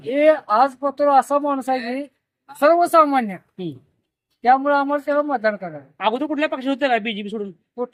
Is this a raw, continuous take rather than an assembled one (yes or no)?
yes